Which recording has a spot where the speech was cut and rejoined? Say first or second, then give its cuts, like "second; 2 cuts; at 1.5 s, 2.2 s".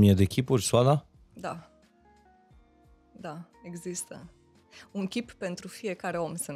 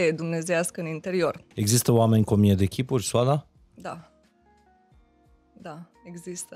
second; 1 cut; at 1.4 s